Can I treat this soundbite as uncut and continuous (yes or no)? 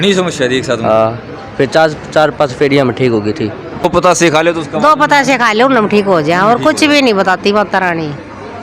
no